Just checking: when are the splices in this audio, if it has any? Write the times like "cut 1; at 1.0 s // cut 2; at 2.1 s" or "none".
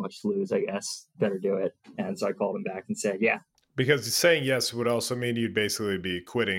cut 1; at 1.1 s